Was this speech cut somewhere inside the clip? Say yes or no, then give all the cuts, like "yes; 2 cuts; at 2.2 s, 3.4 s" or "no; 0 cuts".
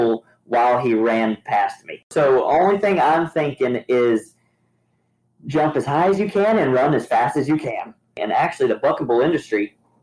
yes; 2 cuts; at 2.1 s, 8.2 s